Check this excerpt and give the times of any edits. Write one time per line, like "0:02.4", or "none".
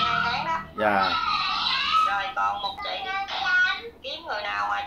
0:02.8